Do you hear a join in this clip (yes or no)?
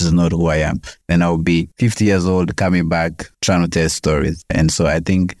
no